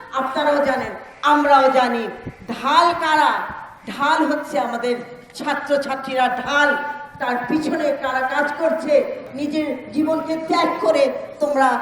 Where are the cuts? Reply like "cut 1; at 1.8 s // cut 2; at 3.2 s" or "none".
cut 1; at 9.2 s